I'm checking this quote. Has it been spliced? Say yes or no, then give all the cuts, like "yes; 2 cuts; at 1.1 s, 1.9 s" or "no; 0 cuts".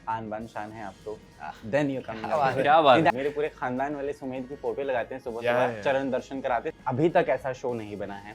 yes; 2 cuts; at 3.1 s, 6.7 s